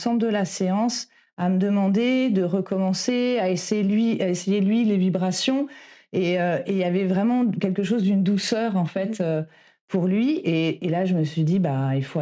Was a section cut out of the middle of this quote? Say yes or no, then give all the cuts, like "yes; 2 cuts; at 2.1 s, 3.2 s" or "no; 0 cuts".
no; 0 cuts